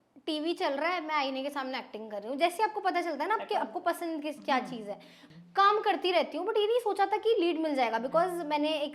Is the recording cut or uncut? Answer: cut